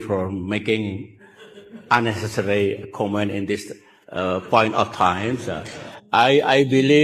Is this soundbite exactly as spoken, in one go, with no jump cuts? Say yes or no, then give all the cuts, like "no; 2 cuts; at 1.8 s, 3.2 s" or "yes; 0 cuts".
yes; 0 cuts